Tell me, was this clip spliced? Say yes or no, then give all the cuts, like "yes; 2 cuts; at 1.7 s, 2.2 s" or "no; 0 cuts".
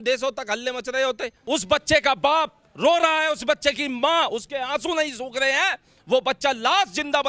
yes; 1 cut; at 1.3 s